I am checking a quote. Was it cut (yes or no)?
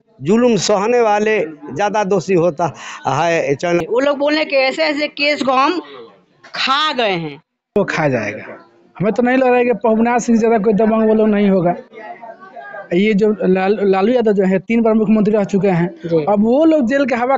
yes